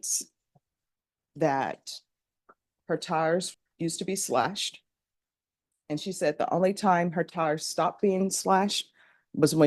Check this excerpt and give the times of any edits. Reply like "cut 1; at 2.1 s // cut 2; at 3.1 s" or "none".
cut 1; at 3.6 s

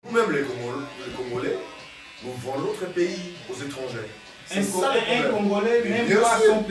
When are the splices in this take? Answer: none

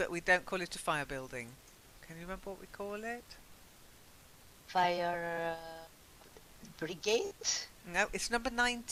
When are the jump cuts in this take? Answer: none

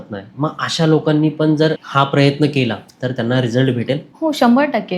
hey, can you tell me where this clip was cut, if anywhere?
cut 1; at 1.8 s

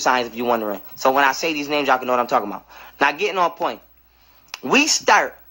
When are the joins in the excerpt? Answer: none

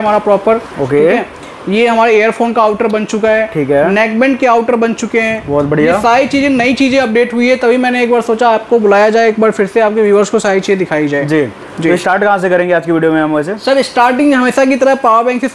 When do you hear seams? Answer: none

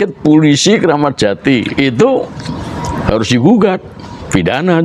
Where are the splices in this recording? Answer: none

